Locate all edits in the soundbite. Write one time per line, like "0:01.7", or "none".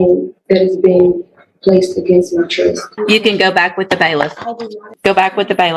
0:02.9
0:04.9